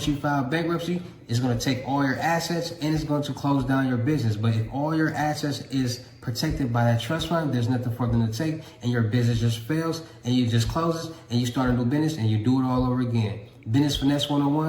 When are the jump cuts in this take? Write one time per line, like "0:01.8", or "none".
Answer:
0:13.4